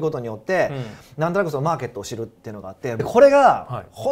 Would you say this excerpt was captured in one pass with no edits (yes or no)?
no